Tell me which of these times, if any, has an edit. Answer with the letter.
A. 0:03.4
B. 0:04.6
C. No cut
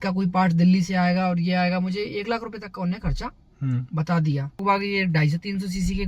B